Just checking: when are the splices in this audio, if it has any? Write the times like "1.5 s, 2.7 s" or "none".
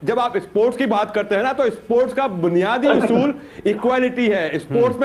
none